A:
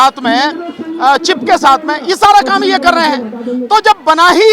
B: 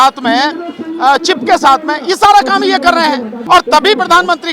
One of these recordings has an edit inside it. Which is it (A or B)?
B